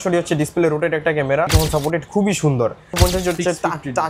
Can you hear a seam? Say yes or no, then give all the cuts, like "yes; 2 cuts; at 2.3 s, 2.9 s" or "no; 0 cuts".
yes; 2 cuts; at 1.5 s, 2.9 s